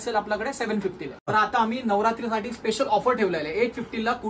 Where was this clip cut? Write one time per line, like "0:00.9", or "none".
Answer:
0:01.6